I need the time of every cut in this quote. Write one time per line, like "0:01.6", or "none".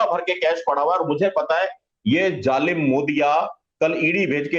none